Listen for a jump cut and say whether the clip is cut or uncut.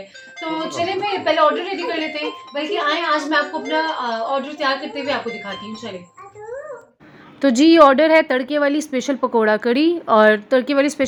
uncut